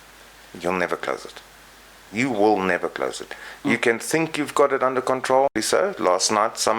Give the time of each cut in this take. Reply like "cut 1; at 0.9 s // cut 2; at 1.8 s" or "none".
cut 1; at 5.6 s

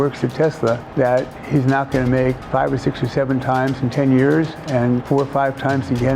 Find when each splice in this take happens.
cut 1; at 1.2 s // cut 2; at 2.4 s // cut 3; at 5.0 s

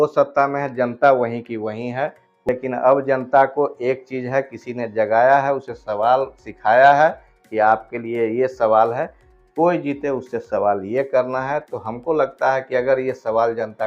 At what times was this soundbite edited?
cut 1; at 2.3 s

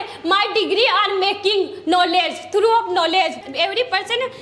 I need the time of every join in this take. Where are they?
cut 1; at 3.4 s

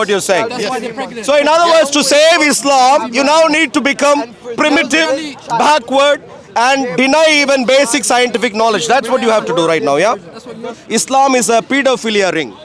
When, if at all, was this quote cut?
cut 1; at 10.8 s

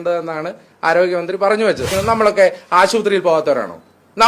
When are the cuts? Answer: cut 1; at 1.9 s

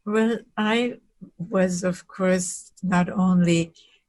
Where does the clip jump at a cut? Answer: cut 1; at 1.1 s

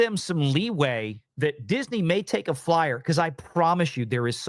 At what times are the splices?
cut 1; at 1.2 s

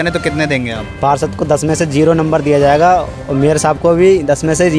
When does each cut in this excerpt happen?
none

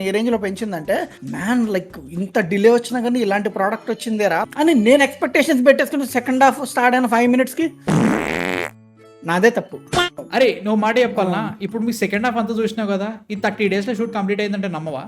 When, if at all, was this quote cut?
cut 1; at 4.5 s // cut 2; at 10.1 s

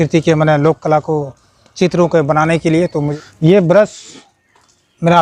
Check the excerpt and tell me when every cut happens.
cut 1; at 2.9 s

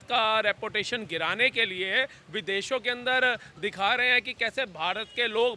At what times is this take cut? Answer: none

